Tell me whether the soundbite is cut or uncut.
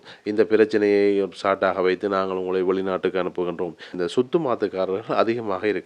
cut